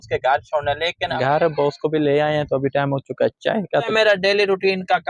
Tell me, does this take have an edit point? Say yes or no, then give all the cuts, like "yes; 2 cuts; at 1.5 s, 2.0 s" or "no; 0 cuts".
yes; 2 cuts; at 1.2 s, 3.9 s